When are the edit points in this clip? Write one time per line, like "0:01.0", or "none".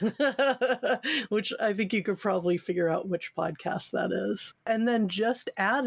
0:04.5